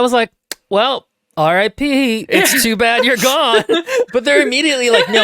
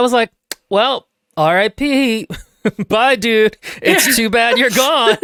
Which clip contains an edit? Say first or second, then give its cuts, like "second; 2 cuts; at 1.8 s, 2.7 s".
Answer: first; 1 cut; at 2.2 s